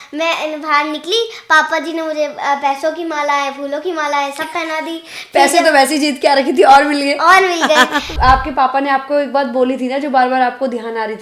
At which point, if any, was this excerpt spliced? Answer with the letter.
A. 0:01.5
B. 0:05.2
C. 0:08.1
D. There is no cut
C